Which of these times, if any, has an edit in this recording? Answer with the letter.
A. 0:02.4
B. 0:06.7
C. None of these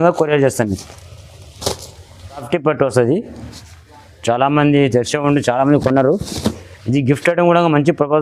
A